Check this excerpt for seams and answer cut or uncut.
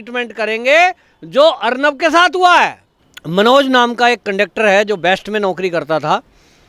cut